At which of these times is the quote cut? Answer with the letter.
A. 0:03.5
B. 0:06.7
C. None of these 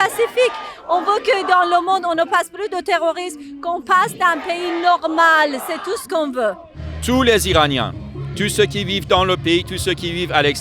B